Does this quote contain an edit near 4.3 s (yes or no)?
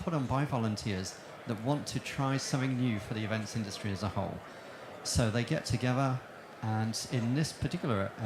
no